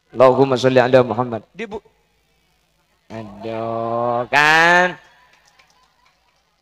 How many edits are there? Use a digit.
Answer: 1